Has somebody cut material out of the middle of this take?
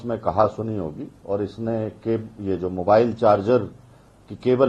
no; 0 cuts

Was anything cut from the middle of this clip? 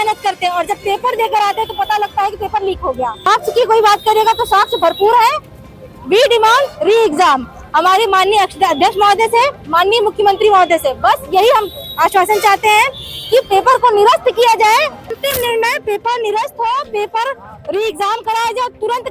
yes; 2 cuts; at 3.3 s, 15.0 s

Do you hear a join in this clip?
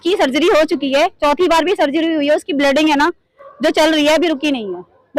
no; 0 cuts

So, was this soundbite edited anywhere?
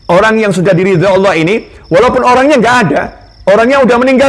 no; 0 cuts

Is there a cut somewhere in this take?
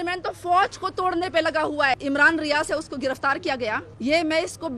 yes; 2 cuts; at 2.0 s, 3.9 s

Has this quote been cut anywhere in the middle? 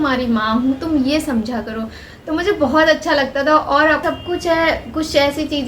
yes; 1 cut; at 4.0 s

